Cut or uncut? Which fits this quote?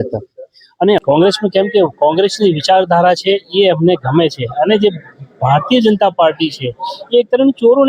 cut